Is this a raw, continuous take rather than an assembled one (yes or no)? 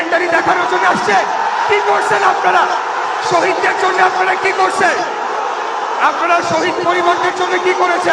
yes